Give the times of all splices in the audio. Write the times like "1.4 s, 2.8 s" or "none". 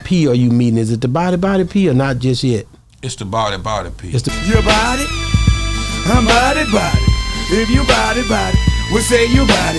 none